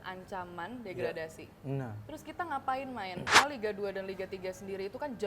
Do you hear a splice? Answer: yes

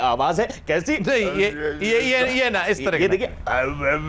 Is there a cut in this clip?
no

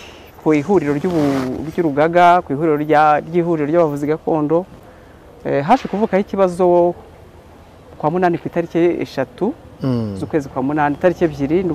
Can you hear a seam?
no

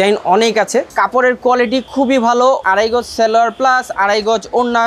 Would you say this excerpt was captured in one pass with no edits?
no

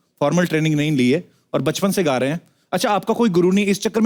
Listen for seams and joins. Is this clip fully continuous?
yes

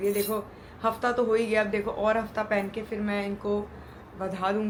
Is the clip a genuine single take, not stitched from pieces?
yes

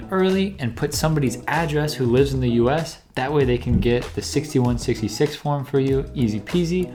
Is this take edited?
no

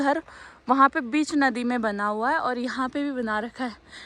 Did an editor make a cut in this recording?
no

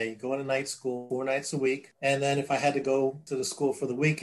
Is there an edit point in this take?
yes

